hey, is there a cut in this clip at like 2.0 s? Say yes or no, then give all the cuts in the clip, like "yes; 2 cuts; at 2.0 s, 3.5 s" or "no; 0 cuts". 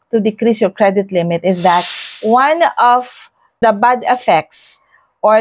yes; 2 cuts; at 2.0 s, 3.5 s